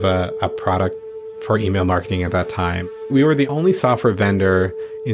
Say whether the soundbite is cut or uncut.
cut